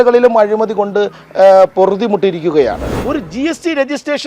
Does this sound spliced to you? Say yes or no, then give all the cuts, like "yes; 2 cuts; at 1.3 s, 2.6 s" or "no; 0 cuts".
yes; 1 cut; at 3.0 s